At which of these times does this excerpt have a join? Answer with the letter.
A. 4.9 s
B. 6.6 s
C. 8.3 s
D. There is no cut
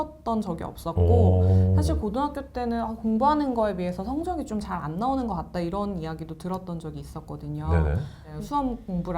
C